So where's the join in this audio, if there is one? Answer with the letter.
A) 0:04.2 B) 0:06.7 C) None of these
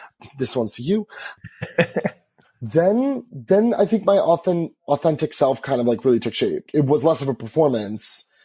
B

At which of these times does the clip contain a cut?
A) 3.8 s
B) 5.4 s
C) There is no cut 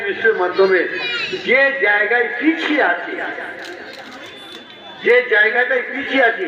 C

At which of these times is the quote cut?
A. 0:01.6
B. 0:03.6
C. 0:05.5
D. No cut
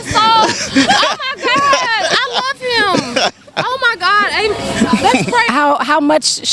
C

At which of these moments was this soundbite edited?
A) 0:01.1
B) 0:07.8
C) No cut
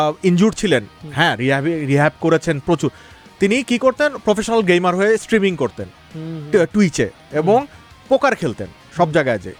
C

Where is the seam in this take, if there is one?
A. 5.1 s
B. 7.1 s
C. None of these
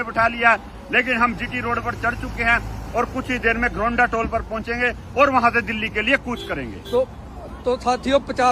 C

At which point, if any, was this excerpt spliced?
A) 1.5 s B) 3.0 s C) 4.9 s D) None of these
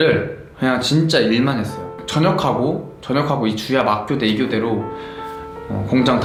D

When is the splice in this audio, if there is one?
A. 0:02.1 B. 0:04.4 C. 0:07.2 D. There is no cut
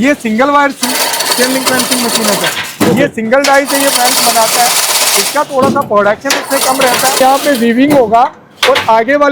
C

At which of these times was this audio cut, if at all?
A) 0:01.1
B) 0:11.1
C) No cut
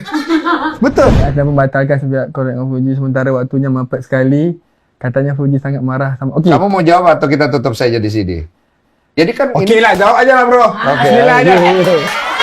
A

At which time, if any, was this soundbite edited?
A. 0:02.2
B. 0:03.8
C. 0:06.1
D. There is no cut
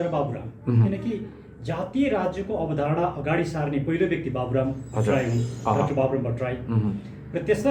D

